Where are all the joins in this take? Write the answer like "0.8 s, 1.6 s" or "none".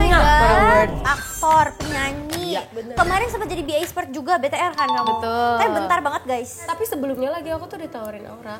1.0 s, 6.6 s